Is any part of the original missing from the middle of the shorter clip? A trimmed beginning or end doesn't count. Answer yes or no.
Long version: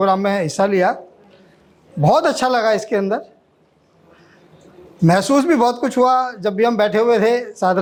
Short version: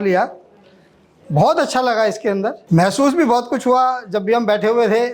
yes